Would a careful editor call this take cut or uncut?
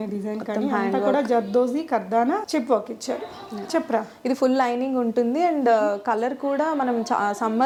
uncut